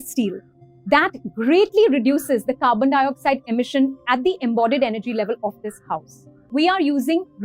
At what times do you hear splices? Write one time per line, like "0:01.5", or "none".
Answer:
0:06.4